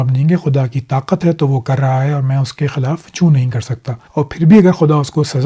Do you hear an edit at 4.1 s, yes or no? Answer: yes